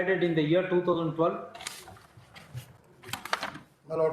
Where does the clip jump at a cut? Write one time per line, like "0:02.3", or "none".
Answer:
none